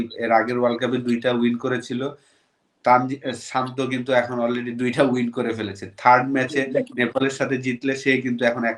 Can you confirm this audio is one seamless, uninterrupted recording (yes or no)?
yes